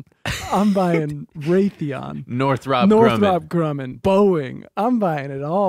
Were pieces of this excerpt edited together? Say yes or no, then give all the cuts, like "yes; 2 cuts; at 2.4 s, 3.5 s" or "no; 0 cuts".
yes; 1 cut; at 3.9 s